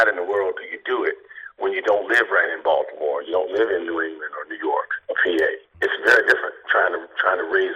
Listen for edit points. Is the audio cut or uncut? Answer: uncut